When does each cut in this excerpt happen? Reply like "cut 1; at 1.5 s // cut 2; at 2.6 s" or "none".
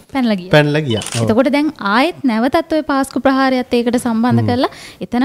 cut 1; at 1.1 s